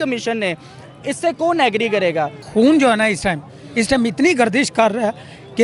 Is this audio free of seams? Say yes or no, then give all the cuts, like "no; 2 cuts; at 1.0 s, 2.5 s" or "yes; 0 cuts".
no; 1 cut; at 2.4 s